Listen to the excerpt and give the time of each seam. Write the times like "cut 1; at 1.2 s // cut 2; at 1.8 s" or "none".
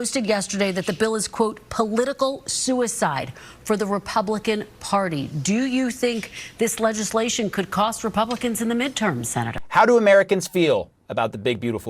cut 1; at 9.5 s